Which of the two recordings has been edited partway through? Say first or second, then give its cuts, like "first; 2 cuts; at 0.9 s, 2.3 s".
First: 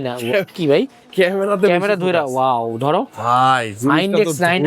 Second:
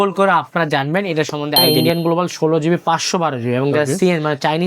second; 1 cut; at 1.7 s